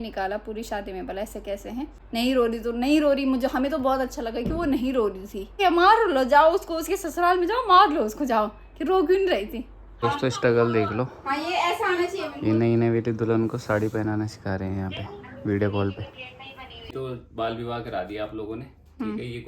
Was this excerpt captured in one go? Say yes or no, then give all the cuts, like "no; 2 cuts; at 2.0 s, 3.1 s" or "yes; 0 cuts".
no; 4 cuts; at 2.0 s, 5.6 s, 10.0 s, 16.8 s